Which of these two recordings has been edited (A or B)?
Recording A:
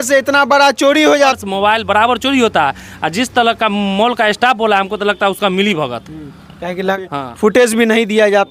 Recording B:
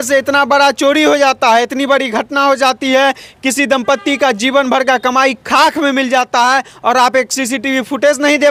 A